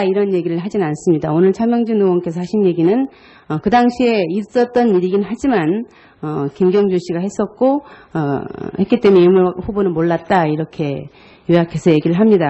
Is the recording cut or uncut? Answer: cut